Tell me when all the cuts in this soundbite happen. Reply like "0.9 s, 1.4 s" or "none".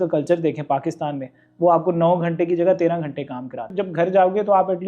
3.7 s

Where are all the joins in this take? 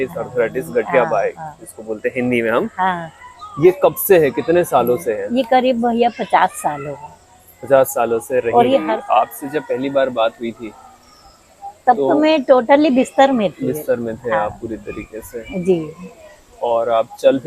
8.8 s

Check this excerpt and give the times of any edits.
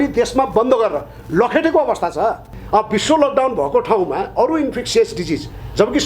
2.5 s

